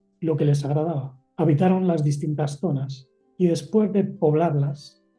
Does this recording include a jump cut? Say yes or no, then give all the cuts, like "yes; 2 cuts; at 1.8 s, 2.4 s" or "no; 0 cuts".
yes; 1 cut; at 1.2 s